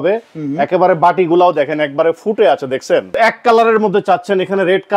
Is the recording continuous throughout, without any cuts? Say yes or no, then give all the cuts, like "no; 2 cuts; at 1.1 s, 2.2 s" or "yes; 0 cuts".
no; 1 cut; at 3.1 s